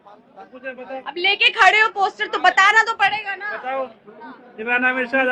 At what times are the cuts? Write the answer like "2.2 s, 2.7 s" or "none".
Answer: none